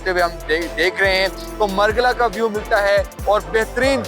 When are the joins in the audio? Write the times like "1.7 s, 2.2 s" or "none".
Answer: 1.4 s